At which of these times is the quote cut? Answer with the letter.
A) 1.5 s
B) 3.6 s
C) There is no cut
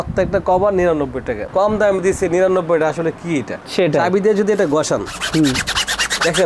A